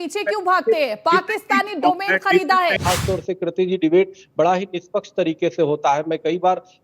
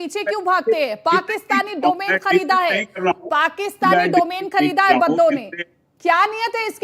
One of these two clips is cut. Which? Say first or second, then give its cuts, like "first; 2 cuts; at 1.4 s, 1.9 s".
first; 1 cut; at 2.8 s